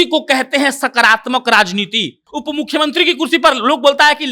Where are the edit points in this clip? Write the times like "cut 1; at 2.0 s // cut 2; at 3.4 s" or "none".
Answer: cut 1; at 2.3 s